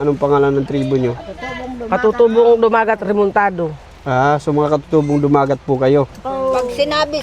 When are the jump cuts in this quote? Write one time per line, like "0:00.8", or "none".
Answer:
0:06.3